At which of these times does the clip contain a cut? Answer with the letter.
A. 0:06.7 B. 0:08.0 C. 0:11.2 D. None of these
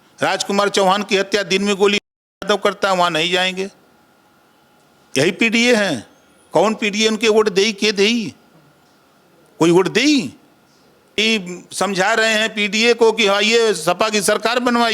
C